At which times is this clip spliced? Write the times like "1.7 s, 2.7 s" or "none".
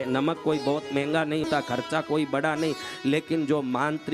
1.5 s